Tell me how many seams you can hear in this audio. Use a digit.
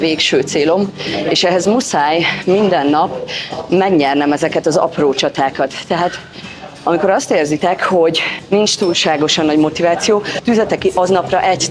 2